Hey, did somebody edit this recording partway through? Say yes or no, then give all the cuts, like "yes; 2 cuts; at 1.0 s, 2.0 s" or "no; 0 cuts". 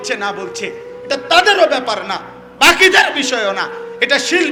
no; 0 cuts